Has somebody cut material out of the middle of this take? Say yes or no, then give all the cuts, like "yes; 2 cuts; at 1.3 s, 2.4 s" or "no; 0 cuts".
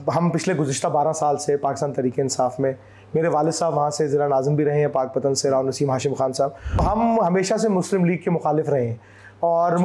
yes; 1 cut; at 6.8 s